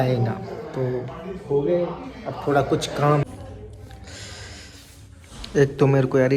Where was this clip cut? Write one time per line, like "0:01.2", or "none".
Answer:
0:03.2